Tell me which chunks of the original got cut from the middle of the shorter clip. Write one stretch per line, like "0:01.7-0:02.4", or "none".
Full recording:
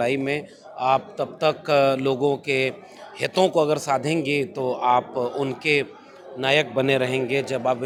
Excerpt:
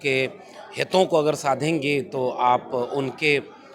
none